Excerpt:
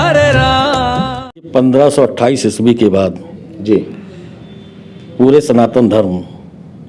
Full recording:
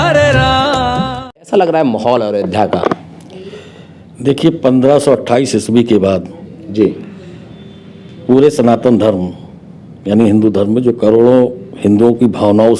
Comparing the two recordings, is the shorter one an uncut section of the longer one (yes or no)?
no